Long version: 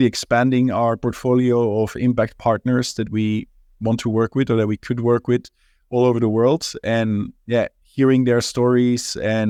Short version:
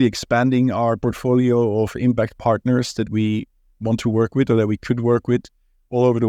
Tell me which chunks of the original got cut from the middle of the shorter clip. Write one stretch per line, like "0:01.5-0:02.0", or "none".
none